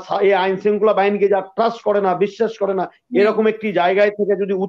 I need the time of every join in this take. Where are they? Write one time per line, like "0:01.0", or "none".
none